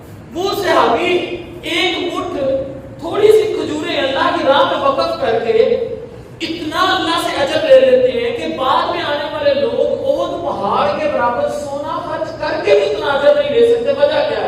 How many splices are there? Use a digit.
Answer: 0